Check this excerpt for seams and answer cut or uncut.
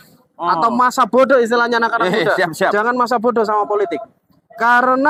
uncut